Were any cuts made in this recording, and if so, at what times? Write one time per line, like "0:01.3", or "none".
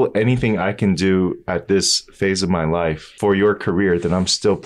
0:03.1